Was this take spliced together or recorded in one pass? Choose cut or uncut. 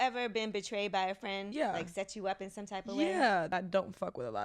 cut